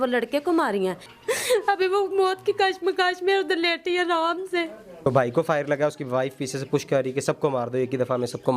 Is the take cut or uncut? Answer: cut